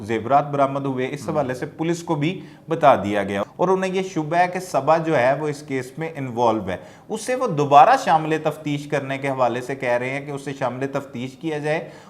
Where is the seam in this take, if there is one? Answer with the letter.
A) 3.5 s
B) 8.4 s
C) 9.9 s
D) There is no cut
A